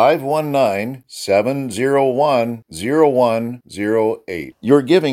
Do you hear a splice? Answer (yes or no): no